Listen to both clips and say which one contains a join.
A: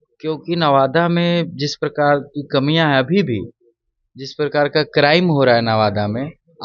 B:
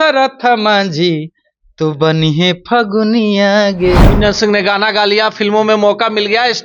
B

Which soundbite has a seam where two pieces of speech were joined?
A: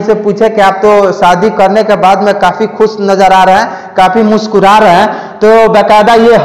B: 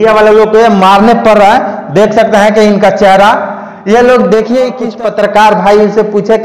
B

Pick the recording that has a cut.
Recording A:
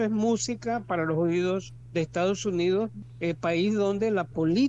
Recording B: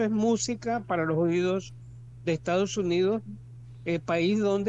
A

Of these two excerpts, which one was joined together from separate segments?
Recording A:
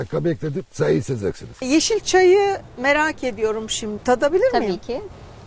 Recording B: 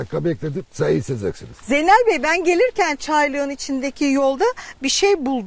A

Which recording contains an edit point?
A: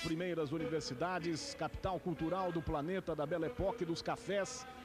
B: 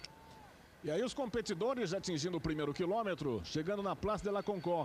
A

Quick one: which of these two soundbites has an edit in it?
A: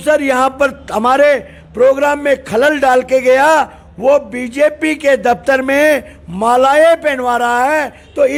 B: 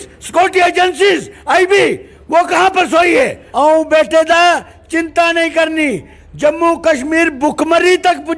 B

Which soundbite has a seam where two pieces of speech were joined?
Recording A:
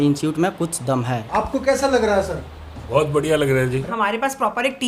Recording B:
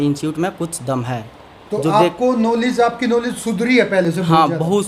A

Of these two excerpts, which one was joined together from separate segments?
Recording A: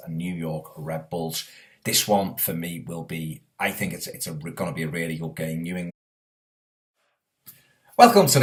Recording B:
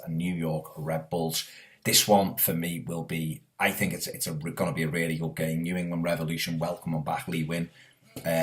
B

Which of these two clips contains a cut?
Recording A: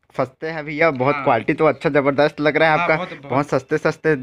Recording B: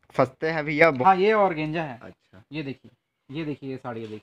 B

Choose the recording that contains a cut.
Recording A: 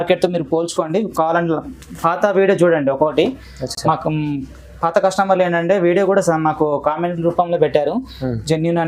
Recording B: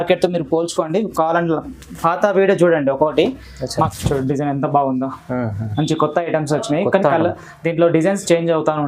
B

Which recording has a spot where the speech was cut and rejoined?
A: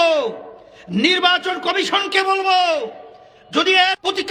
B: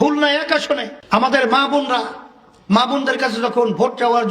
B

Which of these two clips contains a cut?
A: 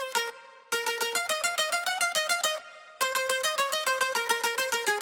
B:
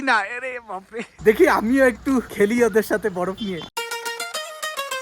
B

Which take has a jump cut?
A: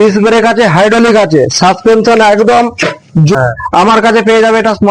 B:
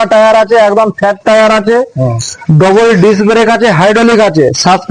A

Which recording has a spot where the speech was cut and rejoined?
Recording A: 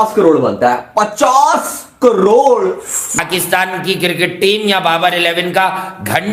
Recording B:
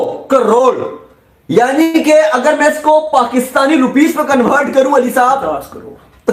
A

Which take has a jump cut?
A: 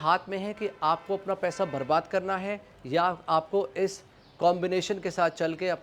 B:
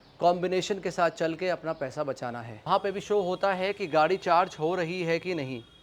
B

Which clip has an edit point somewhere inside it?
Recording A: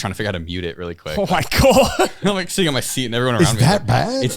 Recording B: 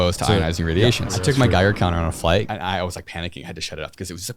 B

